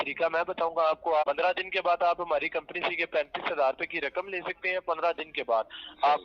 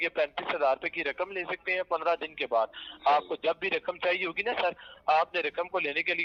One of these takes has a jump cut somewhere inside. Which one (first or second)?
first